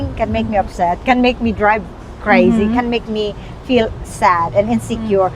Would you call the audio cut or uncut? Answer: uncut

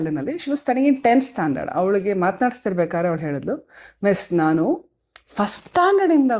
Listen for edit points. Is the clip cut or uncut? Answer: uncut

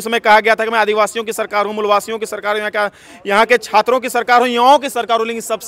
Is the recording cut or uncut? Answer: uncut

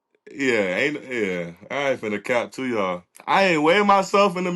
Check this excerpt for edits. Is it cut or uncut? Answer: cut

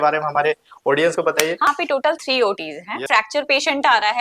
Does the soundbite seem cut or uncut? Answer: cut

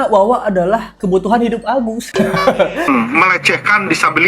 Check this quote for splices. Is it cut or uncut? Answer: cut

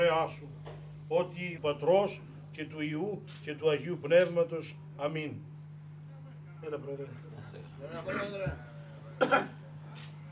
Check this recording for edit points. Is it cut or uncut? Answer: cut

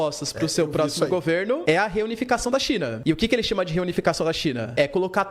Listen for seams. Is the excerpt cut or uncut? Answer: uncut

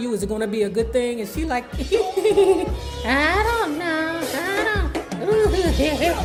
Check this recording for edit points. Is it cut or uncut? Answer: uncut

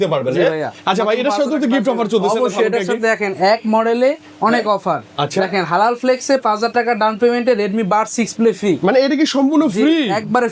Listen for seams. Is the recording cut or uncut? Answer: uncut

